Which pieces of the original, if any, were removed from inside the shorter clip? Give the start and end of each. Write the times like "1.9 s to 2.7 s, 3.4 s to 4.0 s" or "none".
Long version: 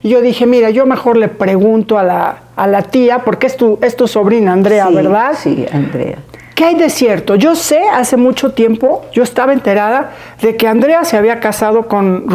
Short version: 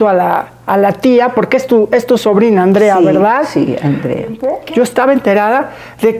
6.4 s to 8.9 s